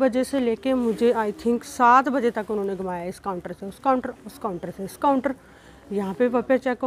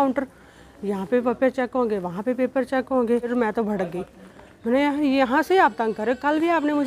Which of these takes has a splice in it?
second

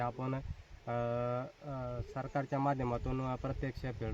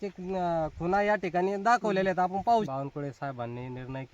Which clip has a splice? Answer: second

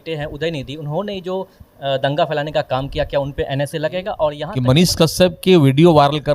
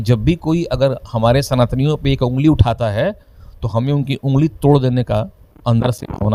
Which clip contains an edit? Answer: first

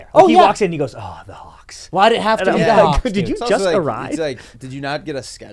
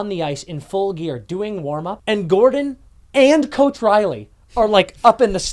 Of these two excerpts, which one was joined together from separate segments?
second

